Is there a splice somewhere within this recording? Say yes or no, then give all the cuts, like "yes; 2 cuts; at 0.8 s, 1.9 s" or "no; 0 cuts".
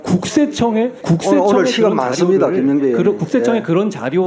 yes; 1 cut; at 1.0 s